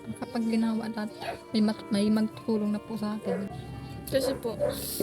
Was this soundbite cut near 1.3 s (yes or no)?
no